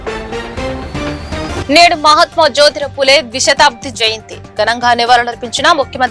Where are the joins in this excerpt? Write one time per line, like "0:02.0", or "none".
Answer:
0:01.4